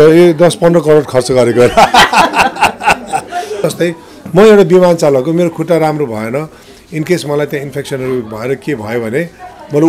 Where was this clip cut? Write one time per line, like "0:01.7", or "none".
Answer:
0:03.6